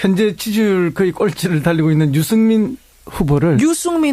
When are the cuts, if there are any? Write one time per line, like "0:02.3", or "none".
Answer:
0:02.6